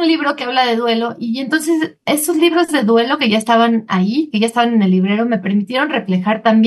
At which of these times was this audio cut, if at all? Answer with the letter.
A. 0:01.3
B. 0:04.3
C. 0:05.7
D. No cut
D